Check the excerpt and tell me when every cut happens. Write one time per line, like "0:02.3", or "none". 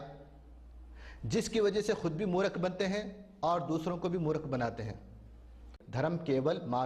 0:05.8